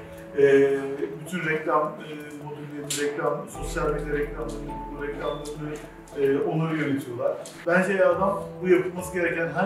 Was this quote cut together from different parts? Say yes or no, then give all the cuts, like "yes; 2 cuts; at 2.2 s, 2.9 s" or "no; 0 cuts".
yes; 1 cut; at 7.5 s